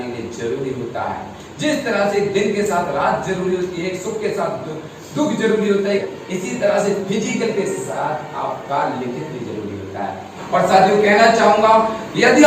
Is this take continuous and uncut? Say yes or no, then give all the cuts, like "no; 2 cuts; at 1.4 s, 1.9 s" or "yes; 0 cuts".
no; 2 cuts; at 6.0 s, 10.4 s